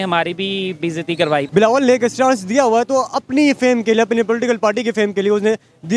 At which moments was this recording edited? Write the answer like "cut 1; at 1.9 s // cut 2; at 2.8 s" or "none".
cut 1; at 1.5 s